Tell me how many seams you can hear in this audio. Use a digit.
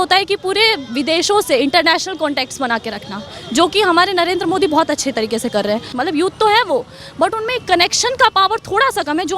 1